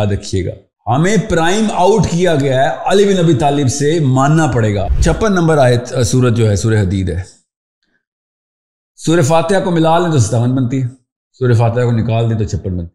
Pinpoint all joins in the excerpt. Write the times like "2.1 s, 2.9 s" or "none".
4.9 s